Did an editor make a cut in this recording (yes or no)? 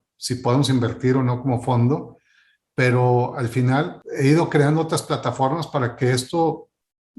yes